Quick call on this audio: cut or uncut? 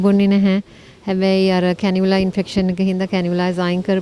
uncut